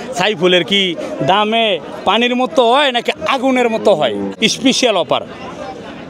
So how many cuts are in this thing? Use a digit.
1